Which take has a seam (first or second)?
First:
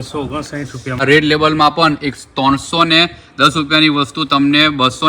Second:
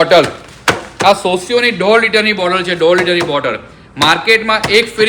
first